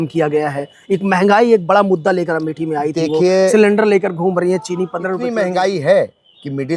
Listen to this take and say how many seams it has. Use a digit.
1